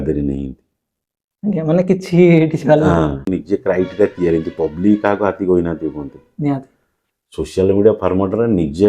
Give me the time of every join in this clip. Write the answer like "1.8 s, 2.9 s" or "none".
3.3 s